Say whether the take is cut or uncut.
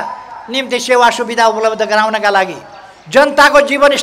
uncut